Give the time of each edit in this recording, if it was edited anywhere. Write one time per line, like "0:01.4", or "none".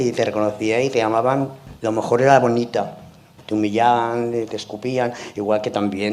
0:01.6